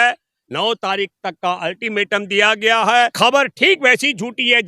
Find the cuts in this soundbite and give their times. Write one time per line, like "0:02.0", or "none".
0:03.1